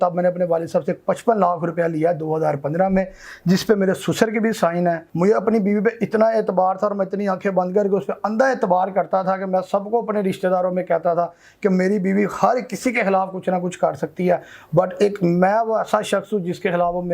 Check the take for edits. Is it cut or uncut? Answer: cut